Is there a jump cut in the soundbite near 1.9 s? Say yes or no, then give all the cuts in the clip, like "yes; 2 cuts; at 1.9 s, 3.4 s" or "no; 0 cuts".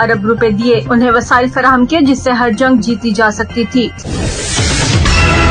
no; 1 cut; at 4.0 s